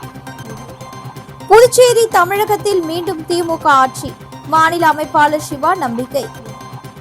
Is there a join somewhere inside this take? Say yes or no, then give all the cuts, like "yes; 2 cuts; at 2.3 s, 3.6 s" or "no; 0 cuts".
yes; 1 cut; at 1.0 s